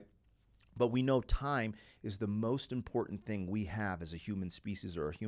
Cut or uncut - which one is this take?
uncut